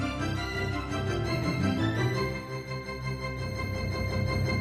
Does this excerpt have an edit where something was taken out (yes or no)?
no